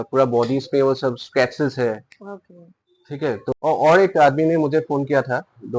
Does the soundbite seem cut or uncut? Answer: cut